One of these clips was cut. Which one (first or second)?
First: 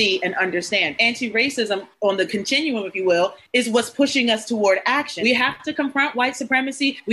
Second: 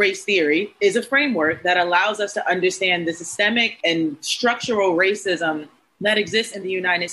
first